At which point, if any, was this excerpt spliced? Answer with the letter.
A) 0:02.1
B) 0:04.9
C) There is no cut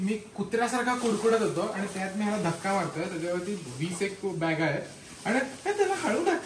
C